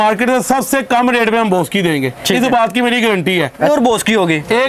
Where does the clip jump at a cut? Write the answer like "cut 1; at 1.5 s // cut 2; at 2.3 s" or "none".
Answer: cut 1; at 3.7 s